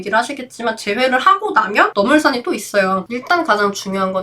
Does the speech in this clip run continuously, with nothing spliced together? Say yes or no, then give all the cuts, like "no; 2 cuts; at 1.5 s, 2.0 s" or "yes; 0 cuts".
no; 1 cut; at 3.0 s